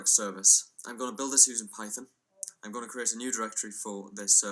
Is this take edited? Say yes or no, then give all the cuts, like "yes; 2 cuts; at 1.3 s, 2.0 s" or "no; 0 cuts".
yes; 1 cut; at 3.3 s